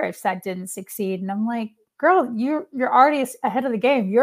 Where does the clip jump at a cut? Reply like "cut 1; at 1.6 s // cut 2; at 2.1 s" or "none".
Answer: none